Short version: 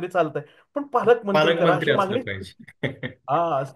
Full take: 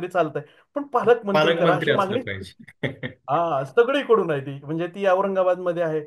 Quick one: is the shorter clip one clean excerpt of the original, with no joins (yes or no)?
yes